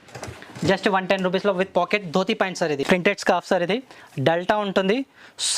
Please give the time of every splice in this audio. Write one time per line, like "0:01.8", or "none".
0:02.8